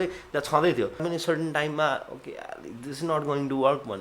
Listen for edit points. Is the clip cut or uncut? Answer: cut